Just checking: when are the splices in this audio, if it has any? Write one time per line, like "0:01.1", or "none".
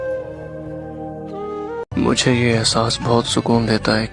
0:01.9